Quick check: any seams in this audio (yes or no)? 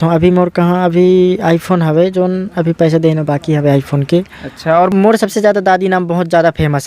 yes